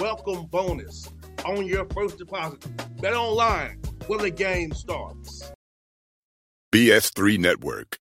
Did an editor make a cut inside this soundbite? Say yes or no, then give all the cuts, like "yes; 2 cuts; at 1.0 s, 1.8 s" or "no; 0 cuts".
yes; 1 cut; at 5.4 s